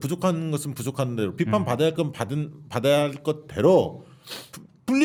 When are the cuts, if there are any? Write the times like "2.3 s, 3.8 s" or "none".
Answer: none